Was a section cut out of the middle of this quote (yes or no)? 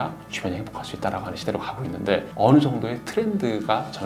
yes